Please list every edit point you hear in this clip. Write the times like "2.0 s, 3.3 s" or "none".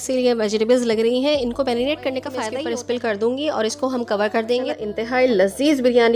2.5 s, 5.0 s